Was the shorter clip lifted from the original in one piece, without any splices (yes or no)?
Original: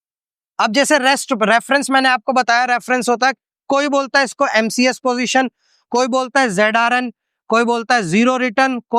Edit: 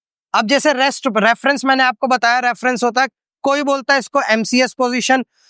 yes